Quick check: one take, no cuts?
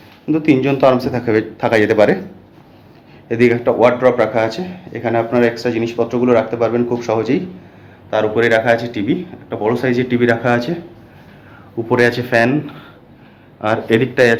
yes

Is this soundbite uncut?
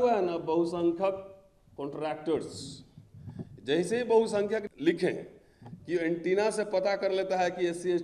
no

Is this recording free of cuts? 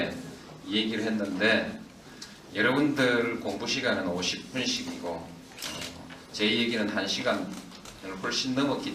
no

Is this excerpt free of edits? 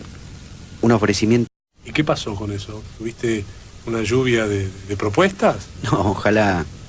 yes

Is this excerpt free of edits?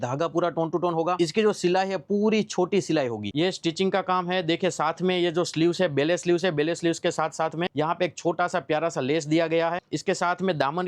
no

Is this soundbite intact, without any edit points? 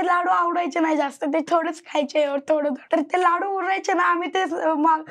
yes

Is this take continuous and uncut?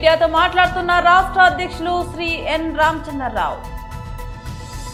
yes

